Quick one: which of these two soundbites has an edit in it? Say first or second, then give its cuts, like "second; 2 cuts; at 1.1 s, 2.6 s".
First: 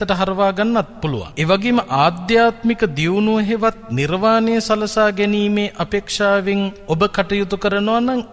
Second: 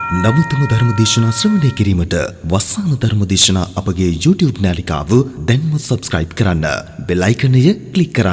first; 2 cuts; at 1.3 s, 6.8 s